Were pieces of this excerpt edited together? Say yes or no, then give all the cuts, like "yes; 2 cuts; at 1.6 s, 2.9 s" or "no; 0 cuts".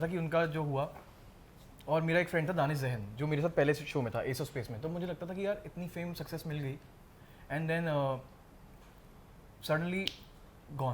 no; 0 cuts